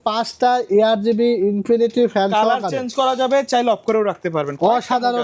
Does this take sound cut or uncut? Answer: uncut